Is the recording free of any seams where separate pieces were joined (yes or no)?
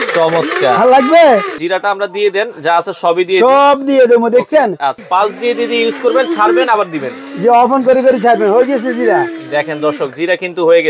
no